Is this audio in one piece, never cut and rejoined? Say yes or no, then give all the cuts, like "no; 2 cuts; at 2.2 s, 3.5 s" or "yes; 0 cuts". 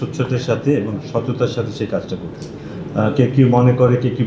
yes; 0 cuts